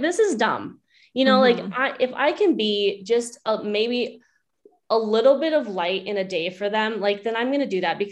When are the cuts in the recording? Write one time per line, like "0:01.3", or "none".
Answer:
none